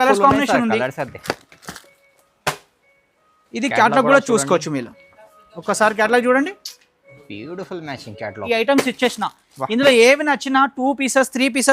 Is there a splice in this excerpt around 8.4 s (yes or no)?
yes